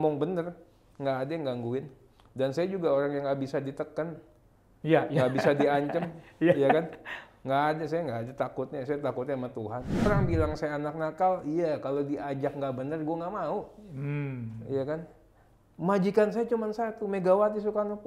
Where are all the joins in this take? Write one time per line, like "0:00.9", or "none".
0:10.1